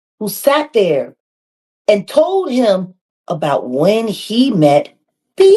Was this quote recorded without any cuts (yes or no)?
yes